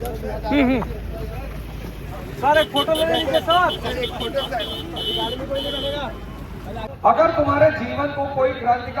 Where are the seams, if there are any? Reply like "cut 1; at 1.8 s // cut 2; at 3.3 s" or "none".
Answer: cut 1; at 6.9 s